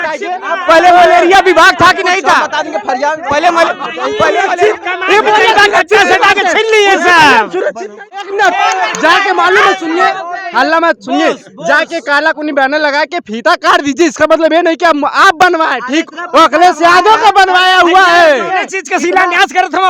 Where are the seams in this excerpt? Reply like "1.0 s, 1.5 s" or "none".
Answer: 8.2 s